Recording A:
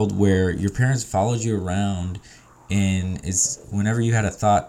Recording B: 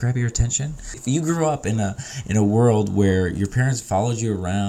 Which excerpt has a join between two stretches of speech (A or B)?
B